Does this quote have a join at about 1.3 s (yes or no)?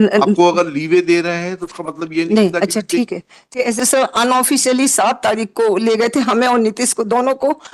no